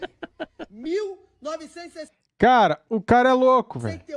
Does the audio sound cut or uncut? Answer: uncut